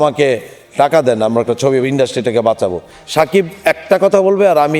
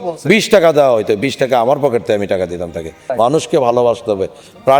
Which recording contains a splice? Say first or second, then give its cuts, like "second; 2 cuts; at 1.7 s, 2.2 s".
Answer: second; 1 cut; at 3.1 s